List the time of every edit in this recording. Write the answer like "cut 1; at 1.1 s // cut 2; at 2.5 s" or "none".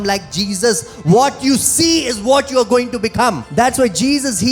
cut 1; at 3.4 s